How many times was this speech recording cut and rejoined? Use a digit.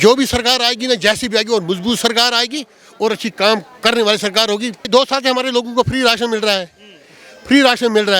1